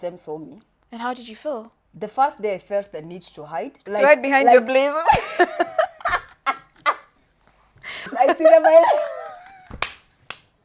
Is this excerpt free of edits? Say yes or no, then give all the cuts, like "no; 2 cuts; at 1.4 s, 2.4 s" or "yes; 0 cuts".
no; 3 cuts; at 1.8 s, 3.8 s, 8.1 s